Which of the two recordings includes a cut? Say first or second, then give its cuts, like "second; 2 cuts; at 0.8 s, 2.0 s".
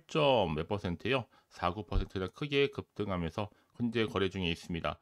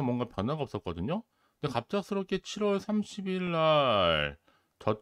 first; 1 cut; at 3.6 s